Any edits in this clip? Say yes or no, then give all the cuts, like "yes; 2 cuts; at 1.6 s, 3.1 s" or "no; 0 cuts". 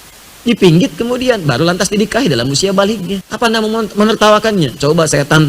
yes; 1 cut; at 3.2 s